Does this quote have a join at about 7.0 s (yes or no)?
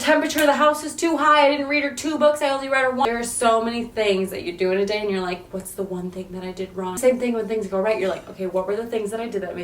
yes